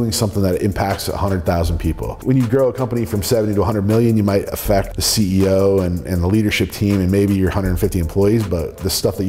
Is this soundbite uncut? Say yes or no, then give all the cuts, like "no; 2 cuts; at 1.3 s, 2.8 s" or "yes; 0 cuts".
no; 2 cuts; at 2.2 s, 4.9 s